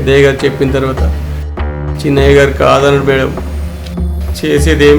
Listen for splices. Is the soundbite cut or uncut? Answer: uncut